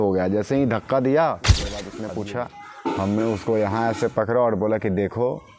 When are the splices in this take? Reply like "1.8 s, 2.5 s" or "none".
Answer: 1.8 s